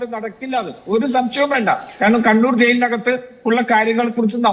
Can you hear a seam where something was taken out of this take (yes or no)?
no